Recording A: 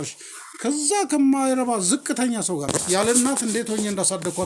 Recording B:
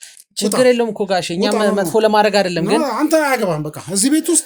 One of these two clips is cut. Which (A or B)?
A